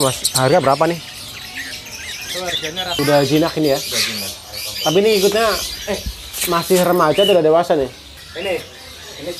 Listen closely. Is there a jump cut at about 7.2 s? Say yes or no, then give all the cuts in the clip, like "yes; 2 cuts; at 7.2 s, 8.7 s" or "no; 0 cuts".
no; 1 cut; at 2.9 s